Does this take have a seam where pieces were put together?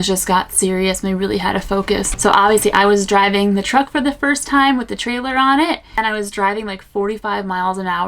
yes; 2 cuts; at 2.1 s, 5.9 s

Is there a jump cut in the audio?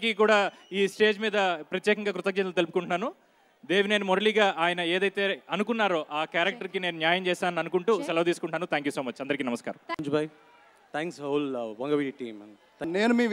yes; 1 cut; at 10.0 s

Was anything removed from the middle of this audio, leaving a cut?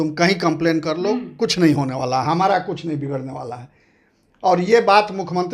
no; 0 cuts

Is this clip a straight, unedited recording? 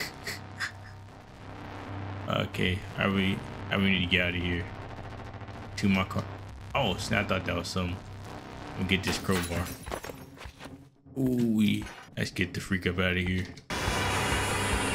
no; 2 cuts; at 12.0 s, 13.7 s

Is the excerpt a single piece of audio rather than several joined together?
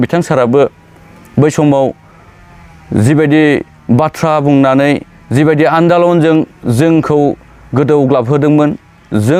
yes; 0 cuts

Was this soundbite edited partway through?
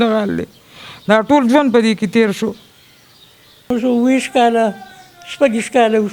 yes; 1 cut; at 3.7 s

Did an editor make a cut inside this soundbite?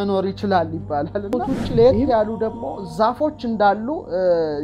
yes; 1 cut; at 1.4 s

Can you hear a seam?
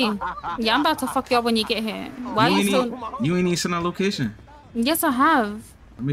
no; 0 cuts

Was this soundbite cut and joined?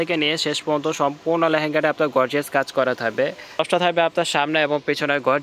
yes; 1 cut; at 3.6 s

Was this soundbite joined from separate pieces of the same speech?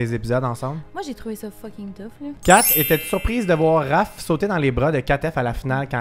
yes; 1 cut; at 2.4 s

